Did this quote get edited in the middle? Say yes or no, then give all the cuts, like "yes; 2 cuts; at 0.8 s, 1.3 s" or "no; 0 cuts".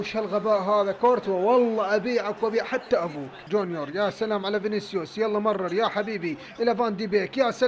yes; 1 cut; at 3.4 s